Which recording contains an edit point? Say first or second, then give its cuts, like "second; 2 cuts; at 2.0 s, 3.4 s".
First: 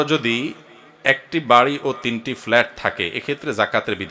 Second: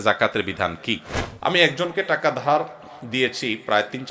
second; 1 cut; at 1.5 s